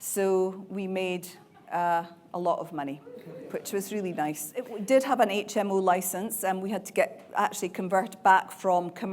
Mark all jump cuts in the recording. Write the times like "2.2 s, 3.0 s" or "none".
4.8 s